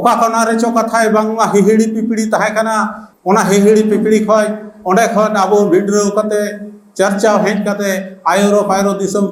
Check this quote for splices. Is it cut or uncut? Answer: uncut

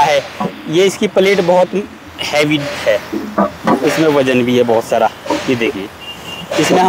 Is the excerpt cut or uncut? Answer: uncut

